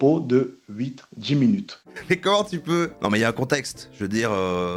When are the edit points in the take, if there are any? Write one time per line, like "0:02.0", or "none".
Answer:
none